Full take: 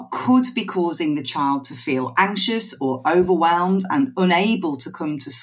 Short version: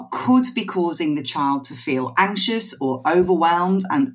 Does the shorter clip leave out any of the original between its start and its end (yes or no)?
no